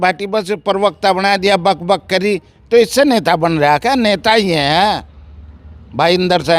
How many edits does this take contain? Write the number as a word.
zero